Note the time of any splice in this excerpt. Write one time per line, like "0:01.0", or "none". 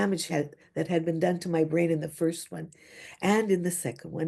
none